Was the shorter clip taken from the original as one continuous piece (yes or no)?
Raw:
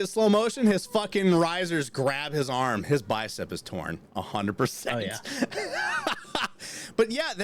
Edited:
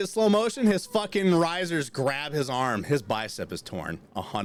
yes